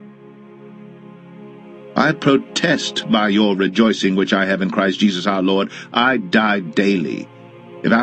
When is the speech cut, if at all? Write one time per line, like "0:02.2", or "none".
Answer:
0:01.8